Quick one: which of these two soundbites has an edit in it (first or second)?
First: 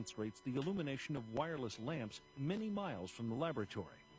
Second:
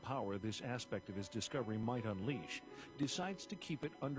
first